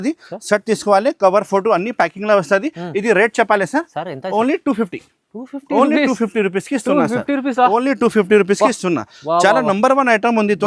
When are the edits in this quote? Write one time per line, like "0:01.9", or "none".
none